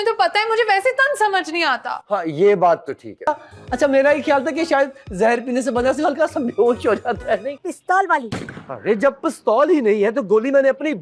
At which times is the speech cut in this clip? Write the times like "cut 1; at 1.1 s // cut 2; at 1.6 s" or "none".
cut 1; at 3.3 s // cut 2; at 7.6 s

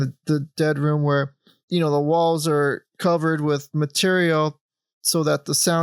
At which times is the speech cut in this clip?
cut 1; at 2.9 s

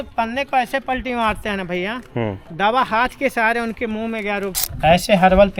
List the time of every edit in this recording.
cut 1; at 4.6 s

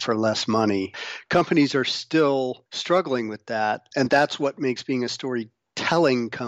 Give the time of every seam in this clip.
cut 1; at 1.0 s // cut 2; at 2.7 s // cut 3; at 3.9 s

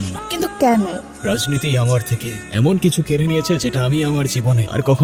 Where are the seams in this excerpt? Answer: none

